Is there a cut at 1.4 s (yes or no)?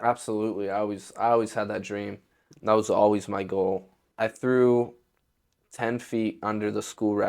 no